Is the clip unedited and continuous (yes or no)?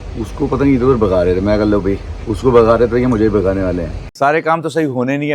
no